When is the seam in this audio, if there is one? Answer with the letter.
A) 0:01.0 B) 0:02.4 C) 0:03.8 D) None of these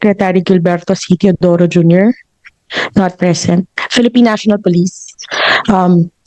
C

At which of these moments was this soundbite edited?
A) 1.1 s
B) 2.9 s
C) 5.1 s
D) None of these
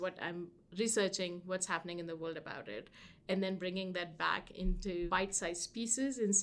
C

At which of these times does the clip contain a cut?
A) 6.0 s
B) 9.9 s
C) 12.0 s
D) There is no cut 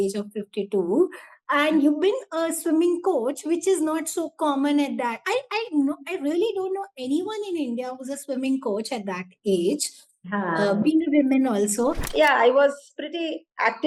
C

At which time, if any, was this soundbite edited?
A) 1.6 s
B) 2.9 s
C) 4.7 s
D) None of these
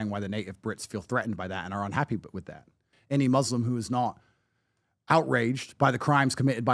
B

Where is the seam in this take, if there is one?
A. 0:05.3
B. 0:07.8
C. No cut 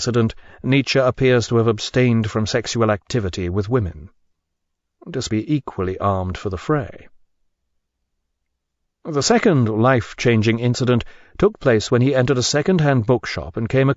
C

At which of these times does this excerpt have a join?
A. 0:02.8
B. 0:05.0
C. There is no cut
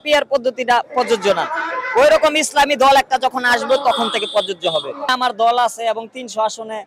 B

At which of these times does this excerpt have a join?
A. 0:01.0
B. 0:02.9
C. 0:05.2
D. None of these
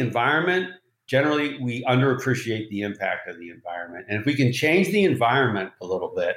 A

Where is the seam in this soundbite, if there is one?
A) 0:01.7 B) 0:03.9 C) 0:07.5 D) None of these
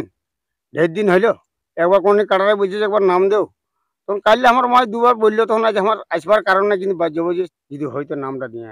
C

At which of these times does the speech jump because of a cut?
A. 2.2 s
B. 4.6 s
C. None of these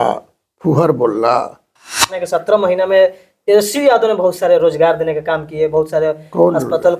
A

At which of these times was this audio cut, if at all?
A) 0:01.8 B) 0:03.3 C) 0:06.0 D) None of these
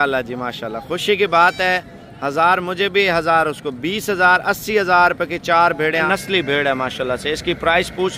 C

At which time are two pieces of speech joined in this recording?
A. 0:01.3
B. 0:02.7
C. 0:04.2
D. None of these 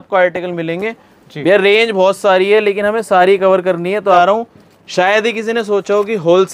C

